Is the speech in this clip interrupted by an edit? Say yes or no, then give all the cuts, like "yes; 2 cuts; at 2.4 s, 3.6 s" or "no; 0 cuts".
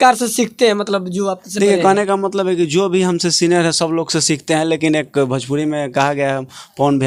no; 0 cuts